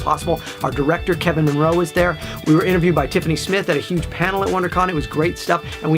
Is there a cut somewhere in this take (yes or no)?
yes